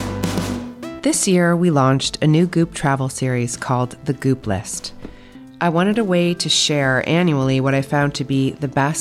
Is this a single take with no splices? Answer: no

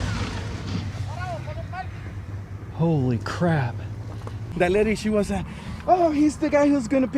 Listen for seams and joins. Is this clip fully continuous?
no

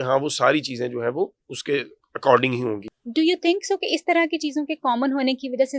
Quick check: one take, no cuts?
no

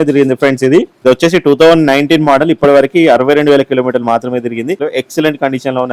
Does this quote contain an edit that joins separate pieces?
yes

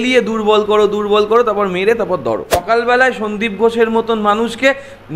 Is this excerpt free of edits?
no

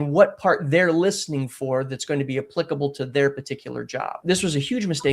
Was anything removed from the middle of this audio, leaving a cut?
yes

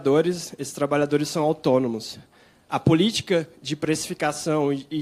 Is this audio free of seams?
yes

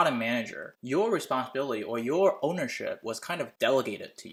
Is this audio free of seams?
yes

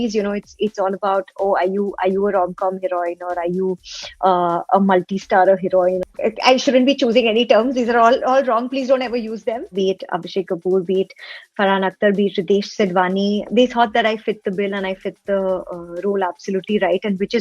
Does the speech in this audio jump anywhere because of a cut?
yes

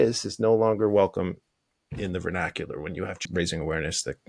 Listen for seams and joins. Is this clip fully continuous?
no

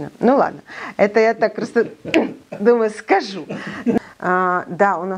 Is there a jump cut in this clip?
yes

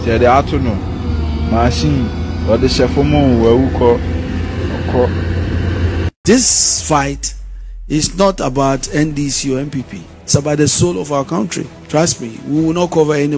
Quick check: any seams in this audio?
yes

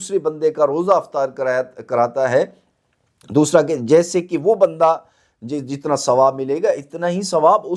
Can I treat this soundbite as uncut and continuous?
yes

